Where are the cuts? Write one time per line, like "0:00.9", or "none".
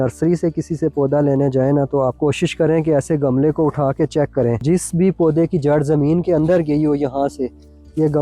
0:02.1
0:04.6